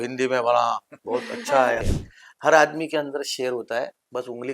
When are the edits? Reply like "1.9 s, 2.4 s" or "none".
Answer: 1.9 s